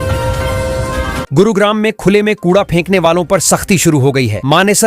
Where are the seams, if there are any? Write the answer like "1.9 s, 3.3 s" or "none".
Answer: 1.3 s